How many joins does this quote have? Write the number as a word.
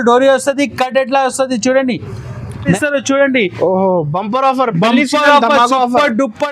one